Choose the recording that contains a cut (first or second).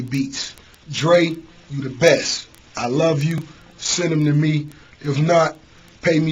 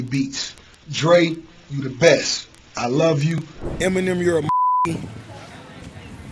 second